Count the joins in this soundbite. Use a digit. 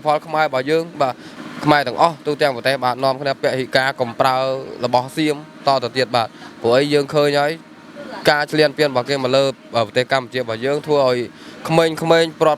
1